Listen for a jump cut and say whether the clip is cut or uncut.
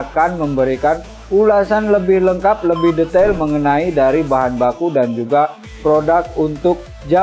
uncut